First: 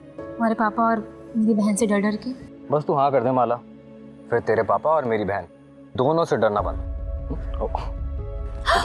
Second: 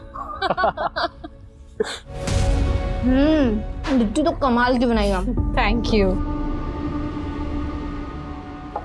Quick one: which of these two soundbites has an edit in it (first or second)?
second